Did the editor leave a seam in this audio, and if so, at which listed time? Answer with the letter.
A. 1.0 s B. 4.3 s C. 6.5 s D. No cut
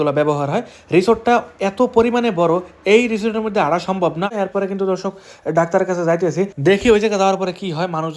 B